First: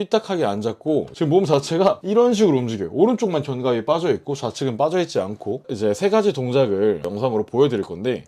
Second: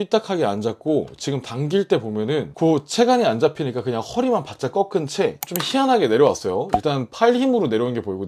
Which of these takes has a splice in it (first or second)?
first